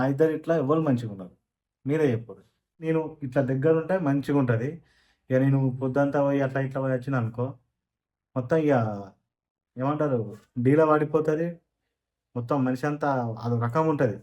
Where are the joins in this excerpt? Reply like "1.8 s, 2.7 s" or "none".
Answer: 2.9 s